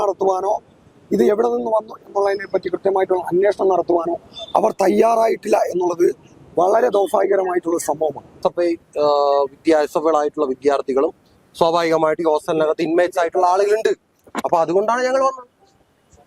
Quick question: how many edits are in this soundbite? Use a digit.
1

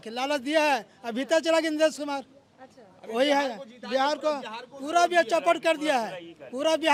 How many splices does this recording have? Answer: 0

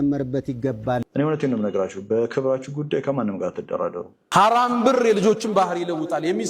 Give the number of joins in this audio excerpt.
2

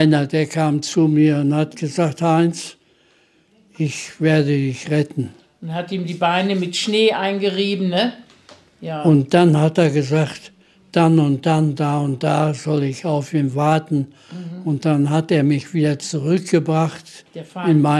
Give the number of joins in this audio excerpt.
0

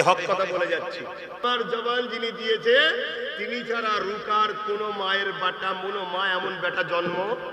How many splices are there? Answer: 1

